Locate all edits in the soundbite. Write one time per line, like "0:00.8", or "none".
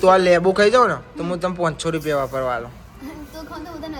none